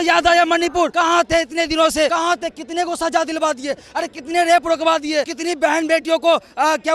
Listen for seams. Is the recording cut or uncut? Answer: cut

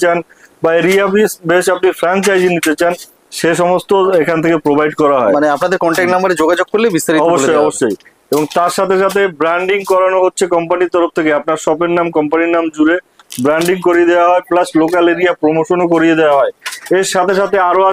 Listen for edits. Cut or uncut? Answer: uncut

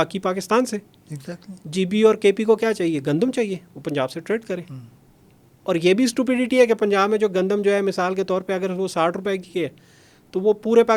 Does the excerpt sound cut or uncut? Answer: uncut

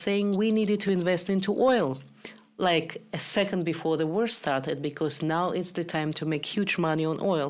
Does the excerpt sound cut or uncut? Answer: uncut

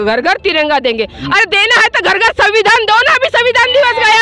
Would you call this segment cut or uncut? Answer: uncut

